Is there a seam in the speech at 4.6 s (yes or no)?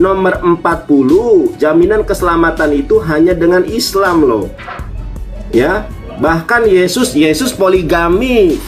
no